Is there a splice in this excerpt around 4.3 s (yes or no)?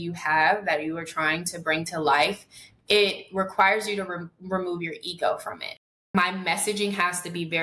no